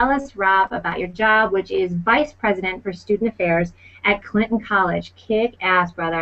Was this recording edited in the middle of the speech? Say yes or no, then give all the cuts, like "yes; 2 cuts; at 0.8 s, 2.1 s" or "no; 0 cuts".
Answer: yes; 1 cut; at 0.9 s